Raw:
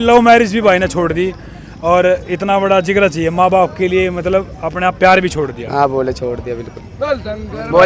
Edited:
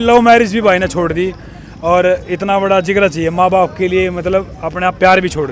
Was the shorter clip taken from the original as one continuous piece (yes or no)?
yes